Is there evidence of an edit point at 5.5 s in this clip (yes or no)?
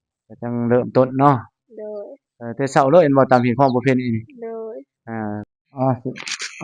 yes